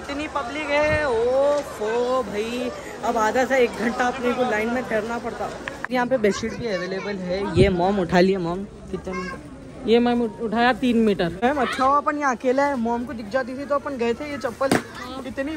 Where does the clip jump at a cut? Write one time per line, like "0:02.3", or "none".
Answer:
0:05.7
0:11.3